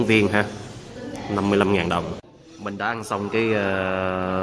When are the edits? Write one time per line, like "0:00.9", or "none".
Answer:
0:02.3